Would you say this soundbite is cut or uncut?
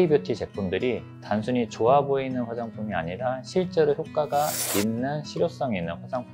uncut